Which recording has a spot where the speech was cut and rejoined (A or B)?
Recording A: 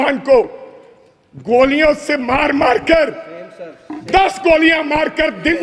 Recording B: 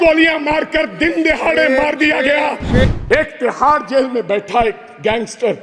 B